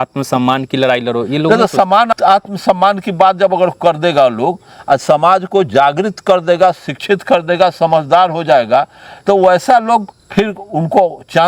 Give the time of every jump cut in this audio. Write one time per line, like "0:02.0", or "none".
0:02.1
0:10.2